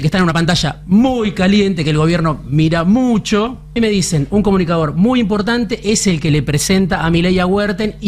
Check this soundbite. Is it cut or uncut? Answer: cut